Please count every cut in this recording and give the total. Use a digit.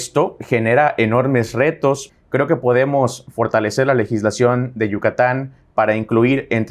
1